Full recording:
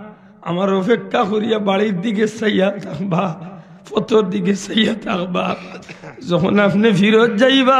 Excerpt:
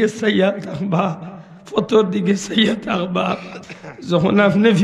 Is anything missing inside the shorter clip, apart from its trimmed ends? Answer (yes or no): no